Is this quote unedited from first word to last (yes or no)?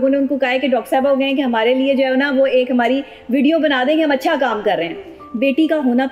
no